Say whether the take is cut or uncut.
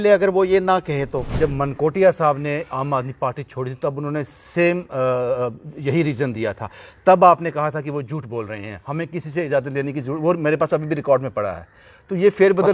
cut